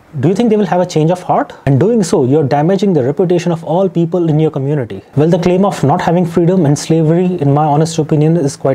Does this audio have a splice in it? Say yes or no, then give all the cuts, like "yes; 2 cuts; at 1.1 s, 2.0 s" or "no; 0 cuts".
yes; 2 cuts; at 1.5 s, 5.1 s